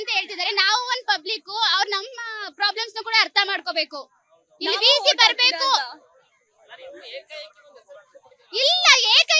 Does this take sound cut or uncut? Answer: uncut